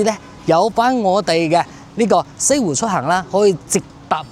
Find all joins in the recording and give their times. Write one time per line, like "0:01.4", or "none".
none